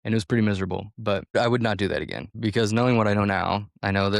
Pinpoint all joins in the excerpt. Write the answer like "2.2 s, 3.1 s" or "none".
1.3 s, 2.3 s